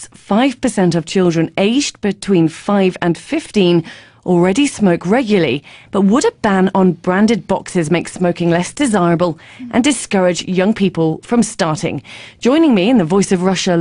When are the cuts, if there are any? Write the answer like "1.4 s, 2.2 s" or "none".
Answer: none